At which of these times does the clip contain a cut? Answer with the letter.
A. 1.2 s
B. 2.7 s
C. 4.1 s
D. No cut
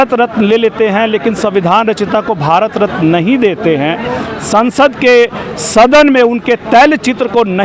D